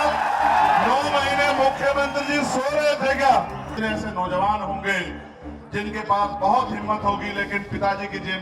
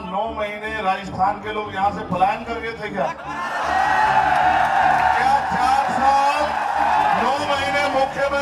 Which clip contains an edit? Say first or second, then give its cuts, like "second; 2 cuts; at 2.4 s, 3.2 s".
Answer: first; 1 cut; at 3.7 s